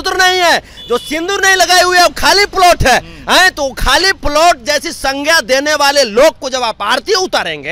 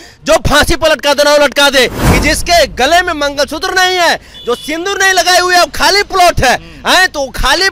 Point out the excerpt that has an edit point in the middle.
second; 1 cut; at 2.0 s

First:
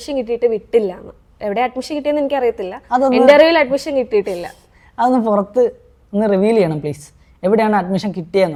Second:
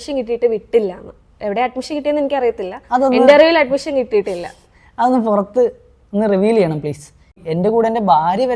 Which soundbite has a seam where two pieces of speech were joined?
second; 1 cut; at 7.4 s

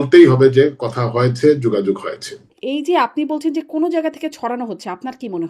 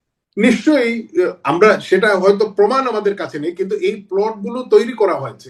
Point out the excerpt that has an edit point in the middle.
first; 1 cut; at 2.5 s

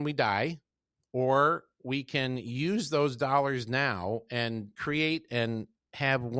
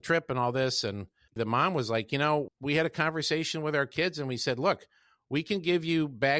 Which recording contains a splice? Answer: second; 2 cuts; at 1.3 s, 2.5 s

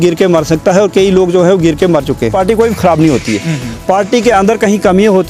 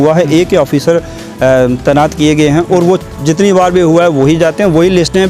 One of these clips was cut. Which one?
first; 1 cut; at 2.3 s

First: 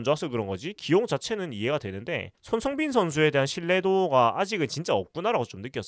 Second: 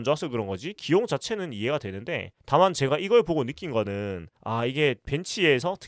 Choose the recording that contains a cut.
first; 1 cut; at 2.3 s

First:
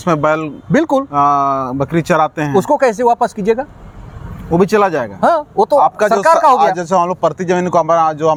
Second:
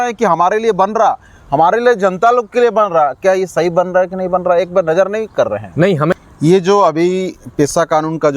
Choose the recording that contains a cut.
second; 1 cut; at 6.1 s

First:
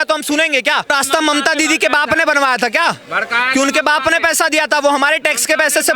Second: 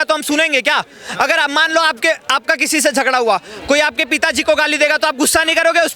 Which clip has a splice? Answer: first; 1 cut; at 0.9 s

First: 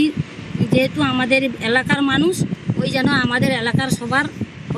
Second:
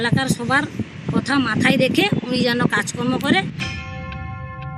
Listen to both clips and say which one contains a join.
second; 1 cut; at 3.5 s

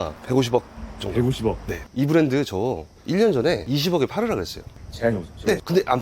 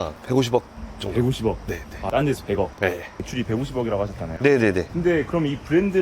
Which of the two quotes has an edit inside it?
first; 1 cut; at 1.8 s

